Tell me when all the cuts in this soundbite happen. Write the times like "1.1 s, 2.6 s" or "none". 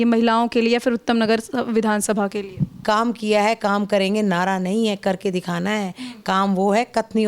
2.8 s